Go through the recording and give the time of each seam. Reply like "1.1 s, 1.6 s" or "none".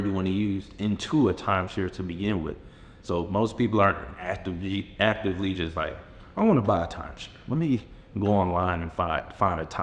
none

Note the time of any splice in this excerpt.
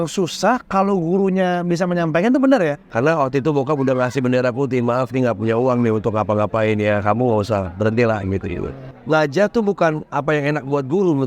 2.8 s, 8.9 s

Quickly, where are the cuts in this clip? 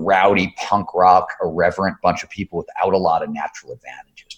none

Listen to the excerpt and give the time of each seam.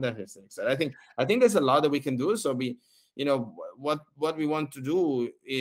none

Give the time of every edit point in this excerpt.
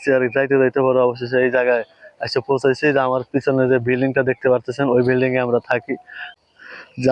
6.2 s

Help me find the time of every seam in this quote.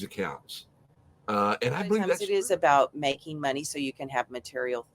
2.2 s

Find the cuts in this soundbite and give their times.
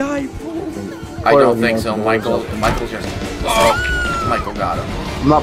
none

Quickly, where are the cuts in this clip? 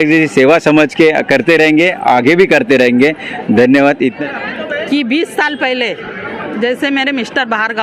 4.1 s

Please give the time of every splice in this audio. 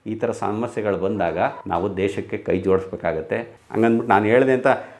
3.5 s

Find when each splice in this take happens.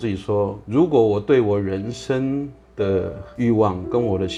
none

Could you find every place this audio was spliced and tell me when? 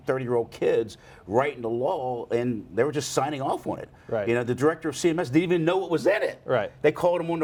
none

